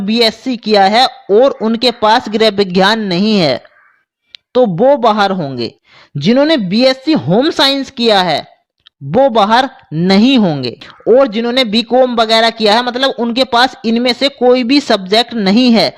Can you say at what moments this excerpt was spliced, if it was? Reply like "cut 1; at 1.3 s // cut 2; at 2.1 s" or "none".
none